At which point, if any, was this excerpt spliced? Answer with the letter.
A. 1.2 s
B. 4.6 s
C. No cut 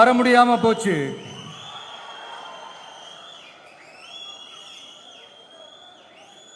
C